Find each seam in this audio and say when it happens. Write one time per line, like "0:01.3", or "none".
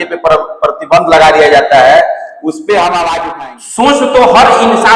0:03.3